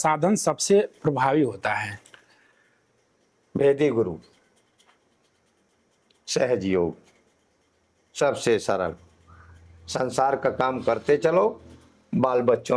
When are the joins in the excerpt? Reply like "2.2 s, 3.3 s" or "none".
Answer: none